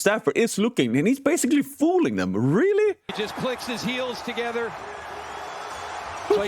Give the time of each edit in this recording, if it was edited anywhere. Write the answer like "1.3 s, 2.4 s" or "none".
3.1 s